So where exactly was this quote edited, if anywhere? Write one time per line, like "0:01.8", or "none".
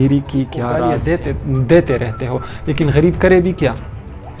0:00.9